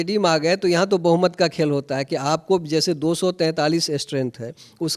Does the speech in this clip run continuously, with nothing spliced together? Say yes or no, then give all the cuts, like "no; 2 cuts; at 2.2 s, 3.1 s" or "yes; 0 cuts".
yes; 0 cuts